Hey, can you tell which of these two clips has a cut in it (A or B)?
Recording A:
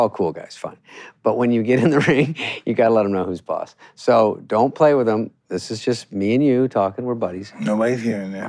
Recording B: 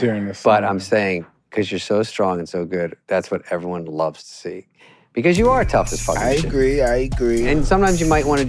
B